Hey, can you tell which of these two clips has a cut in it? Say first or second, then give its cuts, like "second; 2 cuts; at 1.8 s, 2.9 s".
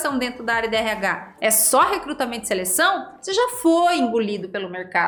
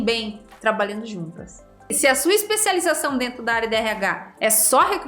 second; 1 cut; at 1.9 s